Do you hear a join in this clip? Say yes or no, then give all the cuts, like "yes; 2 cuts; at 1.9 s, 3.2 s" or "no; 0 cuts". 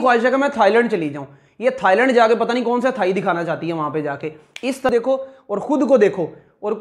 yes; 1 cut; at 4.9 s